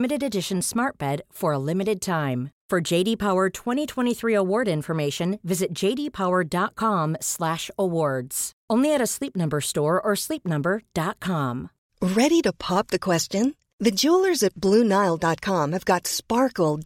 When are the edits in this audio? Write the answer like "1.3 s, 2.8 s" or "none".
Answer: 11.8 s